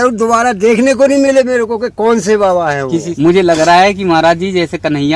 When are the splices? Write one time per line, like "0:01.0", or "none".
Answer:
0:03.1

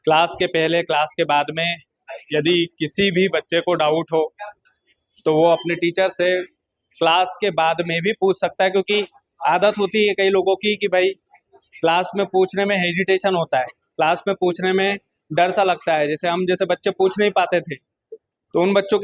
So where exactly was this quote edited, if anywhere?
none

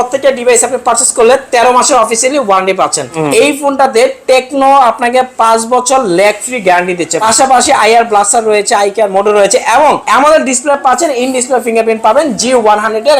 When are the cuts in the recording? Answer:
0:03.1
0:07.2
0:10.0

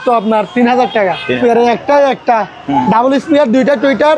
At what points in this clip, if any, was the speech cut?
0:01.4

